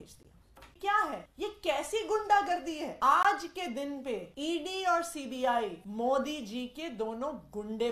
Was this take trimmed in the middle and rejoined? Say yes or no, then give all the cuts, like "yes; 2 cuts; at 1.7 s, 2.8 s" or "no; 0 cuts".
yes; 5 cuts; at 0.8 s, 1.3 s, 2.9 s, 4.3 s, 5.8 s